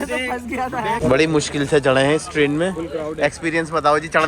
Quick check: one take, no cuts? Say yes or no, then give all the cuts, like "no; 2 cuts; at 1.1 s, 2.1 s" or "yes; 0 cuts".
no; 1 cut; at 1.0 s